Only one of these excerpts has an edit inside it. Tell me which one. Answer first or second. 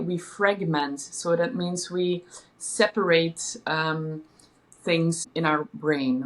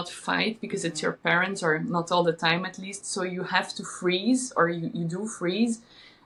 first